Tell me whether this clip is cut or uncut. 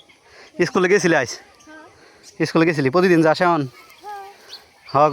uncut